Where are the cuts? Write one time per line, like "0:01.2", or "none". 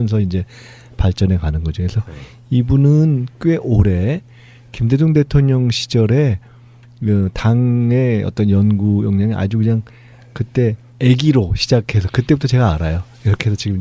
none